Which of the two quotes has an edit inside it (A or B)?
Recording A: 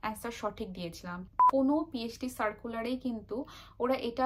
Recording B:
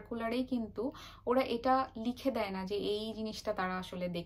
A